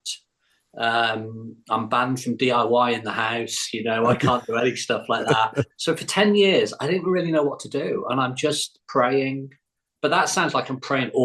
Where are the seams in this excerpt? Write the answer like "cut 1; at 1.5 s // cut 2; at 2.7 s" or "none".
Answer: cut 1; at 5.7 s